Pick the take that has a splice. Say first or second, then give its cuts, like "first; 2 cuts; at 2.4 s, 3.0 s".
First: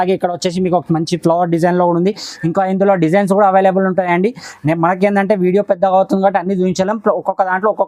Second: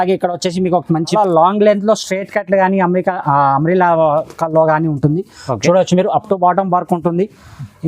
second; 1 cut; at 1.1 s